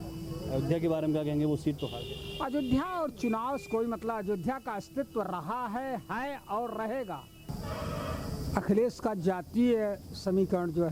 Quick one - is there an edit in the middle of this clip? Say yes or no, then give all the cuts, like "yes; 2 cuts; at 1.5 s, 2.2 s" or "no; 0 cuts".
yes; 1 cut; at 7.5 s